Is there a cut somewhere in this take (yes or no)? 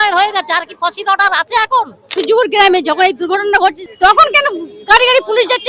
yes